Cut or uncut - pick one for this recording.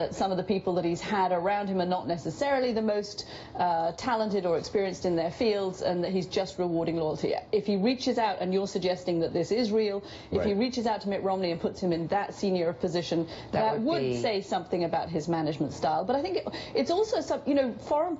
cut